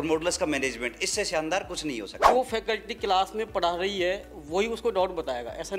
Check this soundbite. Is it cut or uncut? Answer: cut